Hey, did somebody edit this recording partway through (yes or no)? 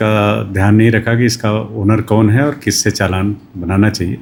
no